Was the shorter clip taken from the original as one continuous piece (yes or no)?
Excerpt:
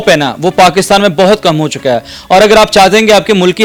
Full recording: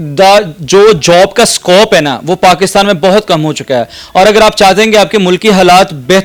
yes